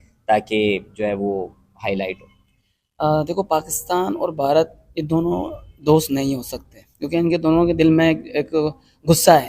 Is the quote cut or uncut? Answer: uncut